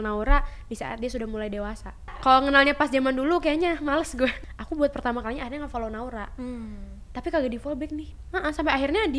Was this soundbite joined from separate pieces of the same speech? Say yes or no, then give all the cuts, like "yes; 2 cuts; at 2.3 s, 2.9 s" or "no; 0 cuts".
yes; 2 cuts; at 2.1 s, 4.4 s